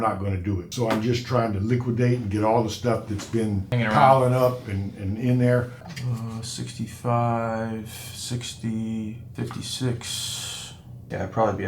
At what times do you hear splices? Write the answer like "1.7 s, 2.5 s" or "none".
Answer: 5.7 s